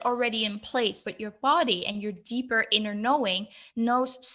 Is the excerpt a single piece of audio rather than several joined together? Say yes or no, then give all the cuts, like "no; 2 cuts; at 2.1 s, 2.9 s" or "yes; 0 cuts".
no; 1 cut; at 1.0 s